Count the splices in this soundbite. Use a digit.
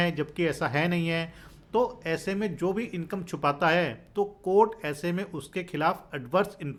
0